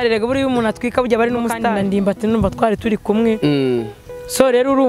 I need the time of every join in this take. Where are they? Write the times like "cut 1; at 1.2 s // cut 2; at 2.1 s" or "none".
cut 1; at 1.6 s